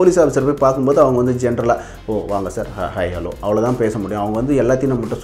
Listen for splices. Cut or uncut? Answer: uncut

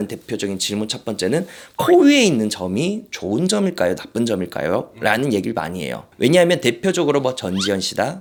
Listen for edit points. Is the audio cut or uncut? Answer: uncut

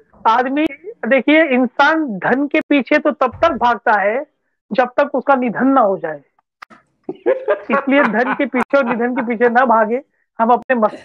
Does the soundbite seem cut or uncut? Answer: uncut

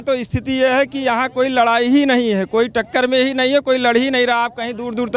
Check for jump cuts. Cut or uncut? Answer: uncut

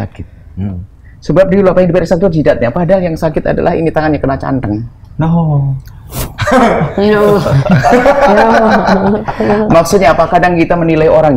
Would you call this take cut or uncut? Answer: uncut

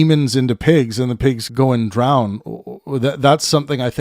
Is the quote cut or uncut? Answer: cut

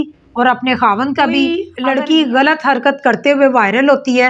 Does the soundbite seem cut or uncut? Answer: cut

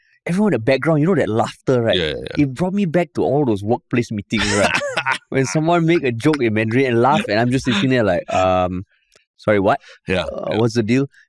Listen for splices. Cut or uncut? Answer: uncut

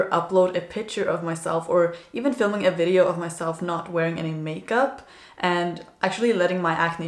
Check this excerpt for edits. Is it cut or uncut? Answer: uncut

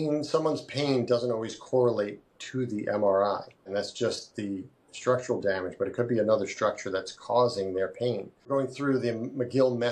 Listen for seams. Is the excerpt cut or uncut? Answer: cut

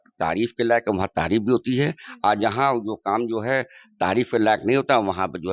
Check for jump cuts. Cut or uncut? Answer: uncut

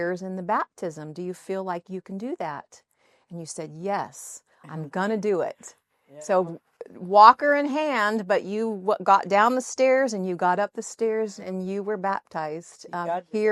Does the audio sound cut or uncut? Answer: uncut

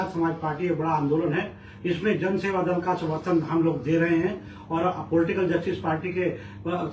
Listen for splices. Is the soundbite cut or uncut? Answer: uncut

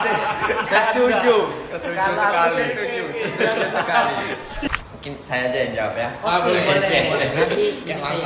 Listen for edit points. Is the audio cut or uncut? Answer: cut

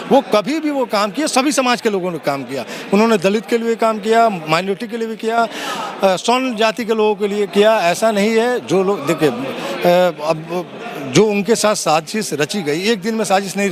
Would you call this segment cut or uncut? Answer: uncut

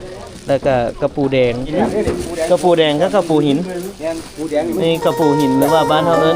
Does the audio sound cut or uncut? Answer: cut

